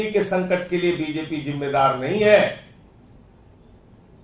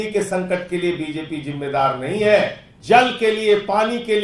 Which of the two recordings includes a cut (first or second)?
second